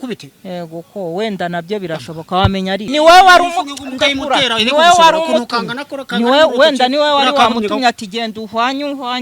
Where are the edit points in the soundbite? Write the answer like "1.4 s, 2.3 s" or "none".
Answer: 2.8 s